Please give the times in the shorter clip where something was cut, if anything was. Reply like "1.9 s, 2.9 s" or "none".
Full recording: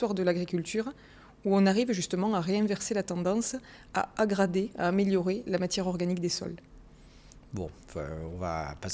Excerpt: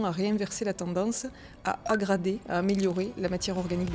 none